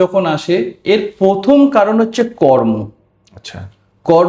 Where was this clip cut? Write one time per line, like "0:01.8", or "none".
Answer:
none